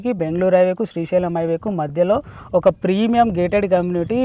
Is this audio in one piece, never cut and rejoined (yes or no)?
yes